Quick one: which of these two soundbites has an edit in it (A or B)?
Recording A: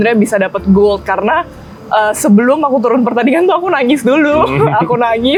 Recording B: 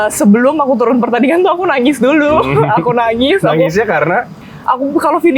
B